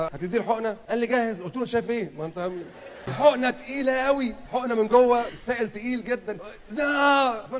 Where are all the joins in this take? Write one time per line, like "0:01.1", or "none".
0:03.1